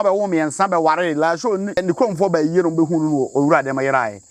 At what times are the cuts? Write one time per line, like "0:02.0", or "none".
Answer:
0:01.8